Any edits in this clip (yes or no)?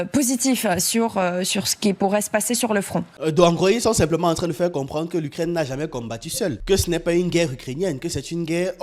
yes